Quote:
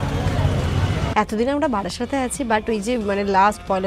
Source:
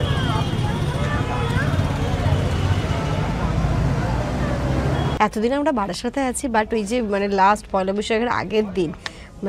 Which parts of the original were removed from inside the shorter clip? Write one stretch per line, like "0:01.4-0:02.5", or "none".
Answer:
0:03.0-0:05.2